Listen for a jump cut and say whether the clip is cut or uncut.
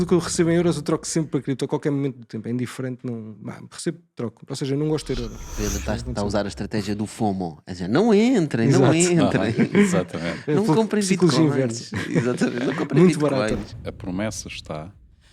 cut